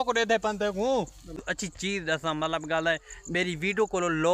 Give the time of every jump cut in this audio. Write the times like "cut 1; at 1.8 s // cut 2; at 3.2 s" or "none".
cut 1; at 1.3 s